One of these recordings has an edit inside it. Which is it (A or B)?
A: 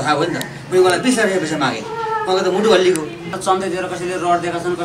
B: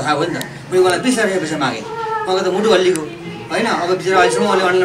A